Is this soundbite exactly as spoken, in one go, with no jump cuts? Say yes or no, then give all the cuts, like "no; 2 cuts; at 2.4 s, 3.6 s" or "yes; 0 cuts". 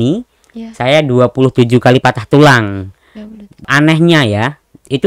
no; 1 cut; at 3.6 s